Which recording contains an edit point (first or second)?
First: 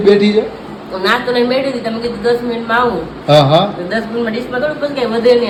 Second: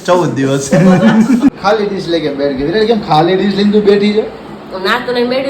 second